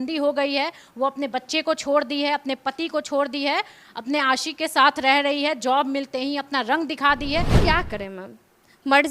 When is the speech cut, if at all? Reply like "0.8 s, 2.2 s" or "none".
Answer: 7.5 s